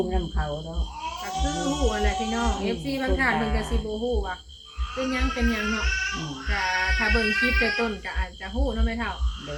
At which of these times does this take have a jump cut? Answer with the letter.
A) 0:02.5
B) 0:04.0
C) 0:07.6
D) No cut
D